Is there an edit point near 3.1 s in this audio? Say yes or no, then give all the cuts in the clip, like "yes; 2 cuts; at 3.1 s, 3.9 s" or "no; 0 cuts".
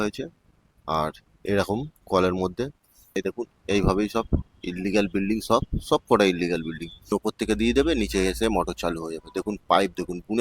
yes; 2 cuts; at 3.1 s, 7.1 s